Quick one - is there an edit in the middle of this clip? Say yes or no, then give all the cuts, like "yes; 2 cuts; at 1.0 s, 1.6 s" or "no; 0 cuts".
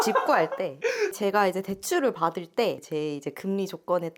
no; 0 cuts